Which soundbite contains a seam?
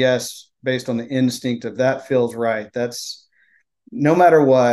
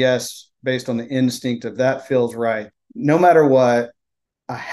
second; 1 cut; at 2.7 s

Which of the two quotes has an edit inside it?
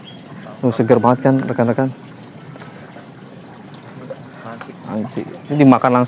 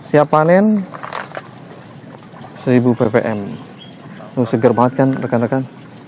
first; 1 cut; at 4.7 s

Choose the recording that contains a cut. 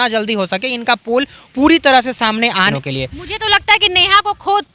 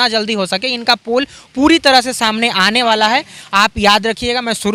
first; 1 cut; at 2.7 s

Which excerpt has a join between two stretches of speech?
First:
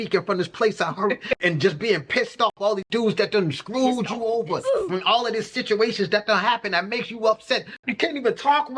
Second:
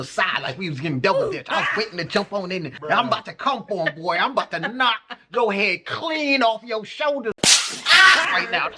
second; 1 cut; at 7.4 s

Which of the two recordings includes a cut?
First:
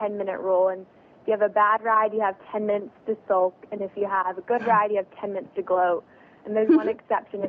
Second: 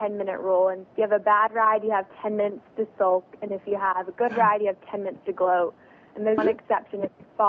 second; 2 cuts; at 0.8 s, 6.4 s

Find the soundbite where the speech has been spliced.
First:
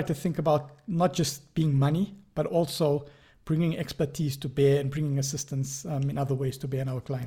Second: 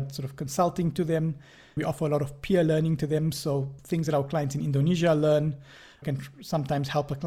second; 3 cuts; at 1.8 s, 3.8 s, 6.0 s

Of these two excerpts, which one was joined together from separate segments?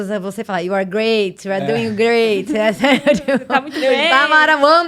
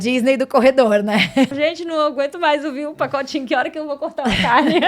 second; 1 cut; at 1.5 s

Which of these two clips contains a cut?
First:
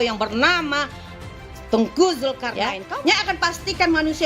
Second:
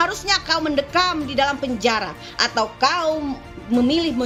first; 1 cut; at 2.5 s

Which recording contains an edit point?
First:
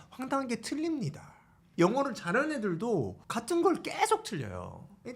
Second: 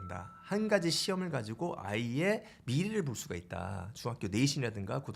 first; 2 cuts; at 1.6 s, 3.2 s

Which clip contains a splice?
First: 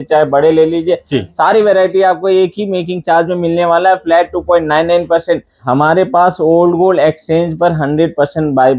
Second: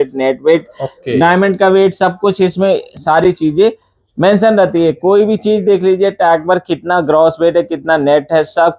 first; 1 cut; at 5.6 s

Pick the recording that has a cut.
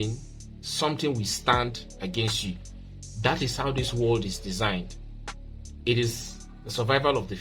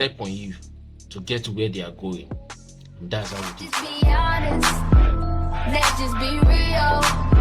second; 1 cut; at 3.5 s

